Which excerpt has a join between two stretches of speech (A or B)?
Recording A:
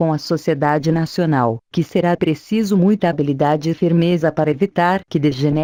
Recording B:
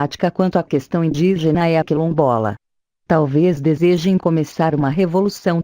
B